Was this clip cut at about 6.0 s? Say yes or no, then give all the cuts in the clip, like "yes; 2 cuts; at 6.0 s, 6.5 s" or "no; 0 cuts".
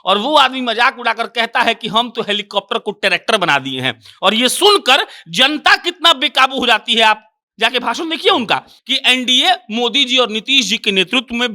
no; 1 cut; at 8.7 s